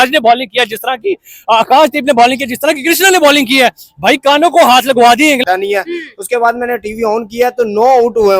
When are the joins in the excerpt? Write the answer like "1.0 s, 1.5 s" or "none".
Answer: 5.4 s

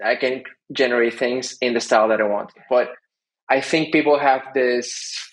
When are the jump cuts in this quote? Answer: 2.6 s

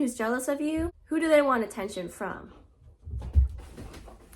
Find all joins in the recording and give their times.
1.0 s

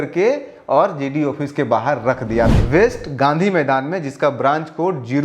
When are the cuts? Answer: 2.5 s

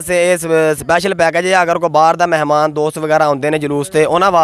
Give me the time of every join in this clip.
none

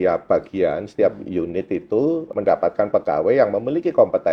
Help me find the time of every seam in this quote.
2.3 s

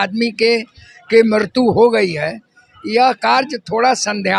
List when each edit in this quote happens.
none

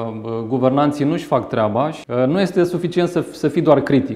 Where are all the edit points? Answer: 2.0 s

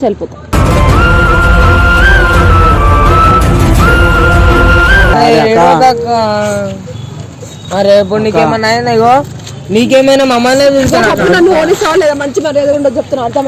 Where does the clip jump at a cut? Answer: 5.1 s

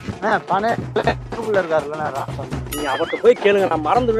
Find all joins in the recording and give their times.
none

